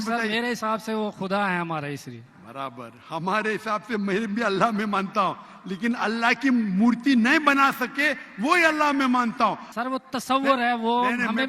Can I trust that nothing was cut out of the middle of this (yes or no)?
no